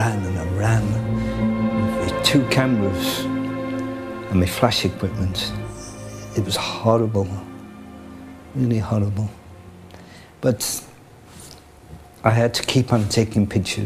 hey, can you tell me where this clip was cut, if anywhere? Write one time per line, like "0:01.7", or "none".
none